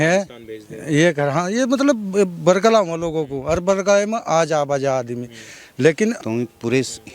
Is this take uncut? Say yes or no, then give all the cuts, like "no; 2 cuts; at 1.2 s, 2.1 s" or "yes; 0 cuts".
no; 1 cut; at 6.2 s